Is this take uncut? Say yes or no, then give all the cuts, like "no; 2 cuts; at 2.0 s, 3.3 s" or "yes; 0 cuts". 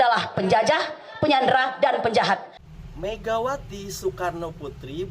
no; 1 cut; at 2.5 s